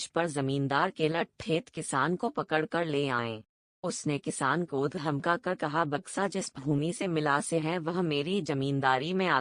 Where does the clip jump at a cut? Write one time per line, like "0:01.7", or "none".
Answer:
none